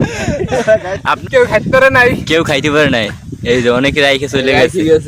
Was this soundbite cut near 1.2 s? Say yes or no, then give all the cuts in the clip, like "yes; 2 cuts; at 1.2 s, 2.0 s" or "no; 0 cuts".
yes; 1 cut; at 1.2 s